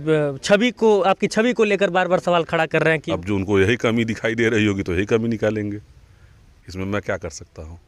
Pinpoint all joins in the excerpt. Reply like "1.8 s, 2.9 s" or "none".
3.1 s